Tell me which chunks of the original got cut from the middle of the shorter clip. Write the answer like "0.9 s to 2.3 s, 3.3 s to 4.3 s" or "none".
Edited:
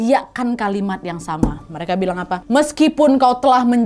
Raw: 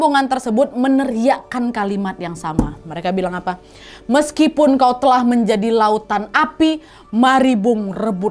3.6 s to 4.0 s